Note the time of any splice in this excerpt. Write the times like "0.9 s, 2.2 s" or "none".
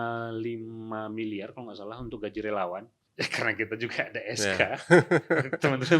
3.0 s